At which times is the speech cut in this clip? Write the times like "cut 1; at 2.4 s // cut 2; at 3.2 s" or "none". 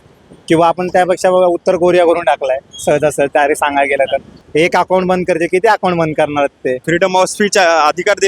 cut 1; at 4.4 s // cut 2; at 6.8 s